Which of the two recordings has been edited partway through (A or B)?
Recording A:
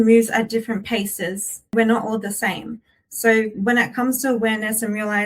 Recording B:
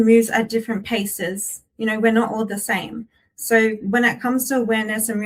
A